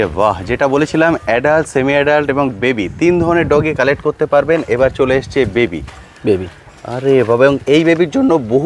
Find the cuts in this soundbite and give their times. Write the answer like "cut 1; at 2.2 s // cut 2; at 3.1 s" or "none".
none